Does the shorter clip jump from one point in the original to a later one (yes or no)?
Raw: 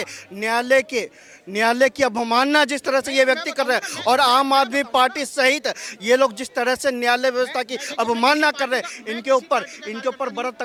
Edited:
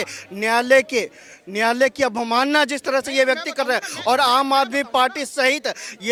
no